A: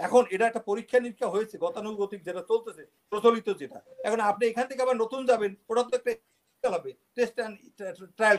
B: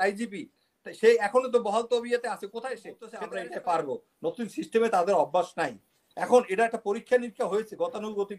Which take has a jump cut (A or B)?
B